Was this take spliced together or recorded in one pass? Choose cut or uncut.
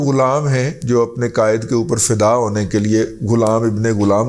uncut